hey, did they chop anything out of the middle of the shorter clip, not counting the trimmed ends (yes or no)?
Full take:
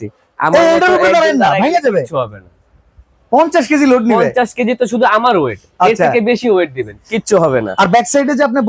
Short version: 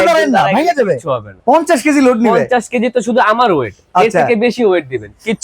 yes